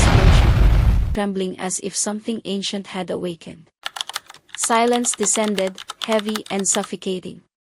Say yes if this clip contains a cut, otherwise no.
yes